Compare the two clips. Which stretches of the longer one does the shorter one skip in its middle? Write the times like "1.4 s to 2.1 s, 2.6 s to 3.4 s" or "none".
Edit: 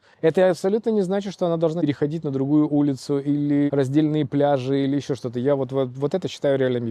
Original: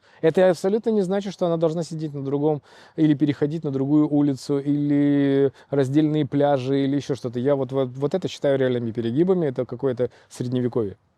1.8 s to 3.2 s, 5.1 s to 5.7 s